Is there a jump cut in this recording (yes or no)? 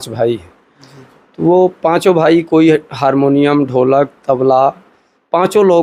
no